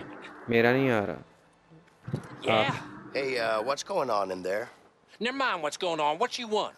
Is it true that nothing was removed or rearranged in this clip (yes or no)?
yes